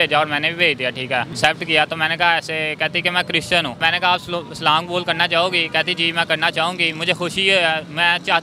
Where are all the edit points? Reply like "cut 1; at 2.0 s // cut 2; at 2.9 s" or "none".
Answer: cut 1; at 1.3 s // cut 2; at 3.8 s